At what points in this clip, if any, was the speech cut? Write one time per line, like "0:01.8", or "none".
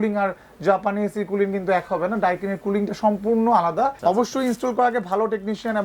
0:04.0